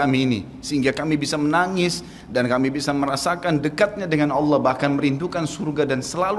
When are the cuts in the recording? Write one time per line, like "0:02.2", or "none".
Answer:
none